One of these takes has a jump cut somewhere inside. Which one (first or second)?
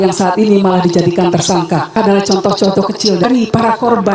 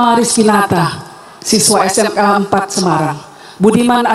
first